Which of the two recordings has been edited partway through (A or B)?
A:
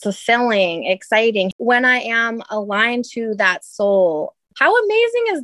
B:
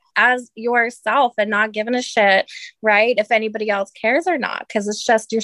A